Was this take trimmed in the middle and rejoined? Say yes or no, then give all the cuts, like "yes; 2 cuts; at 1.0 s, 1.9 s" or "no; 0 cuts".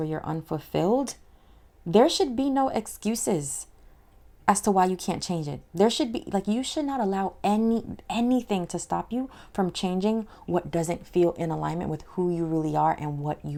no; 0 cuts